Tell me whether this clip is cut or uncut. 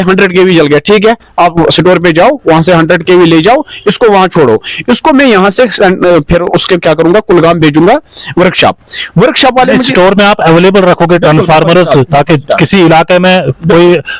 uncut